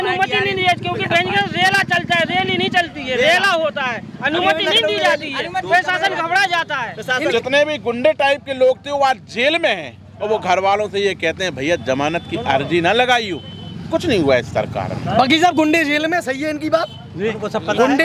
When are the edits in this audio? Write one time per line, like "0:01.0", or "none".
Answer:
0:07.3